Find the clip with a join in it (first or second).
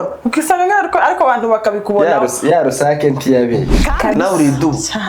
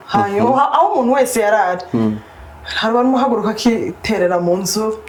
first